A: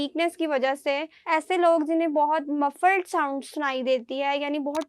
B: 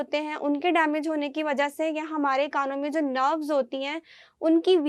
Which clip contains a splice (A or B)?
A